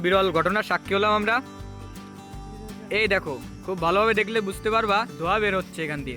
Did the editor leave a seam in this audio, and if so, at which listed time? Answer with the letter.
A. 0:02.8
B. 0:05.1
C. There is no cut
B